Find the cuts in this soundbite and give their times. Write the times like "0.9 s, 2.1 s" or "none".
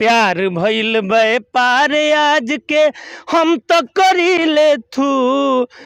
none